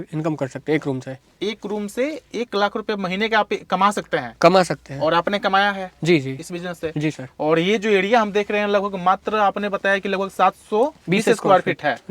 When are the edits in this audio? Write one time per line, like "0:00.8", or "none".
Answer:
none

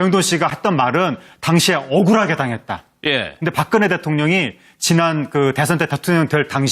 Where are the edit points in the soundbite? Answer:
0:02.1

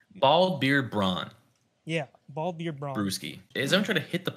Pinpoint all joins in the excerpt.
0:03.4

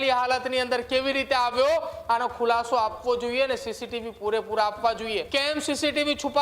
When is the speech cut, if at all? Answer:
0:05.3

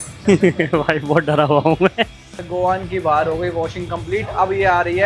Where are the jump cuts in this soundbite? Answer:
0:02.2

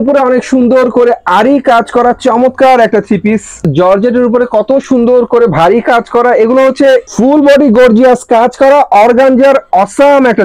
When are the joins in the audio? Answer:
0:03.6
0:07.1

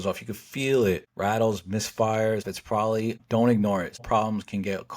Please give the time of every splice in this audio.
0:01.1
0:02.7
0:04.0

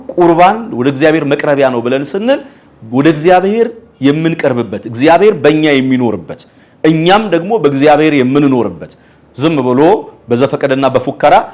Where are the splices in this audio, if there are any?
none

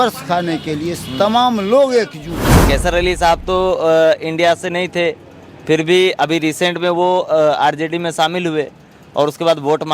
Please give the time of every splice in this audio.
0:02.6

